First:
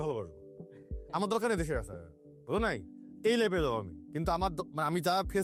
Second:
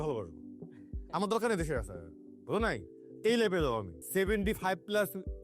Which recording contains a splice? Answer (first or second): second